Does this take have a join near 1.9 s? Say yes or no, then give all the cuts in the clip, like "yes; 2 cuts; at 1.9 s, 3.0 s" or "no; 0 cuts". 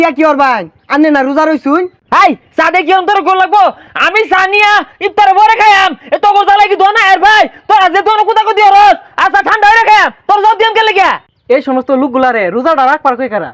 no; 0 cuts